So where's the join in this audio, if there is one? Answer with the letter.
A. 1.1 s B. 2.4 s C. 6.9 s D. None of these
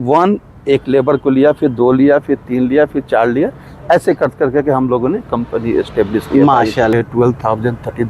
C